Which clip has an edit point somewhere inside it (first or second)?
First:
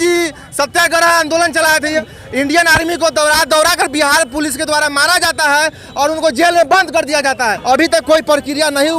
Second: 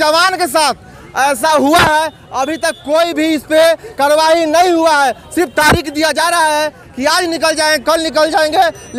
first